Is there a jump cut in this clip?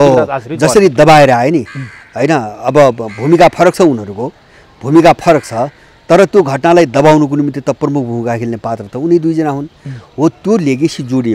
no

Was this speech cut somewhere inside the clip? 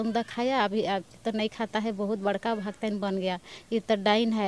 no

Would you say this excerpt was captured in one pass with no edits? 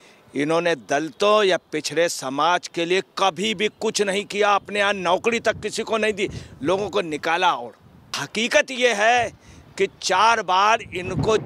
no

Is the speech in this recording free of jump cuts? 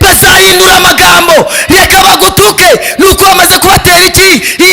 yes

